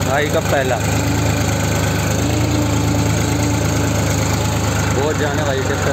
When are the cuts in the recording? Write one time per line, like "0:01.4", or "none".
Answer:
none